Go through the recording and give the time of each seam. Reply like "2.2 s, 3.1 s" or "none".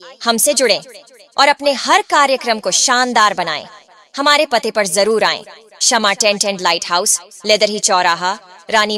0.9 s